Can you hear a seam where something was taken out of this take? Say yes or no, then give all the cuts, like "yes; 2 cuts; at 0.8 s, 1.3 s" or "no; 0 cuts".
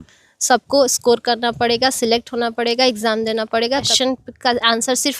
yes; 1 cut; at 3.9 s